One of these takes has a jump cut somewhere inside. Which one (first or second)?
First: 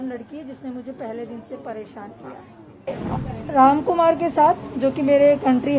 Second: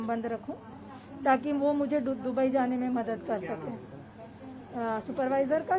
first